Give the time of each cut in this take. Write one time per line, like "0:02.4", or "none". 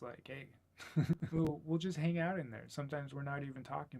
0:01.5